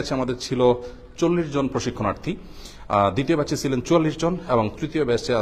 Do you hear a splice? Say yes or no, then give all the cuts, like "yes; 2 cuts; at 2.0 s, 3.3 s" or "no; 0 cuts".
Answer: no; 0 cuts